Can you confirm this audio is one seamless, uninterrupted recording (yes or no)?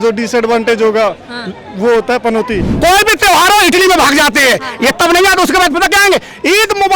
no